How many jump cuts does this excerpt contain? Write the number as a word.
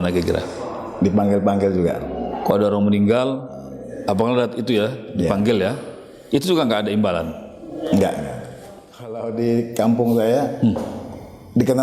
one